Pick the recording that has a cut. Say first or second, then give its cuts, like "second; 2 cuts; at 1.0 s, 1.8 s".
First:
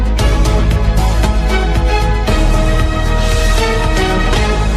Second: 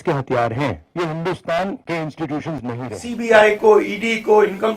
second; 3 cuts; at 0.8 s, 1.8 s, 3.0 s